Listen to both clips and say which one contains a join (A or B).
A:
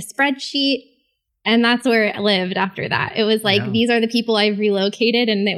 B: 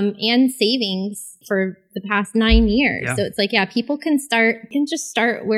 B